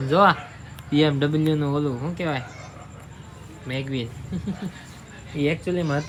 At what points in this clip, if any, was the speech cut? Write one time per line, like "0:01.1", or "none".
none